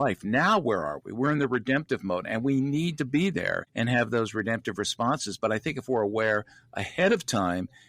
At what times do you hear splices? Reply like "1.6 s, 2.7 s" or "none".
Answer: 3.7 s

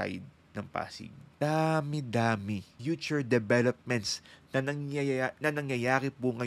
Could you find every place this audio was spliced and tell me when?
1.2 s, 2.7 s

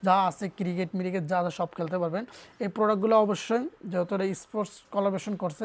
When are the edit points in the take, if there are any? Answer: none

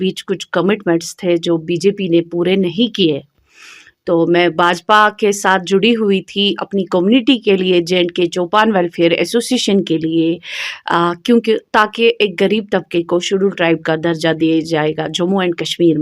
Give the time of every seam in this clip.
none

